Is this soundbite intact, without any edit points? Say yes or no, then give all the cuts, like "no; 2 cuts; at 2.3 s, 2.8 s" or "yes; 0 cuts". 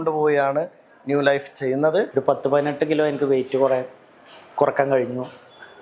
no; 1 cut; at 2.1 s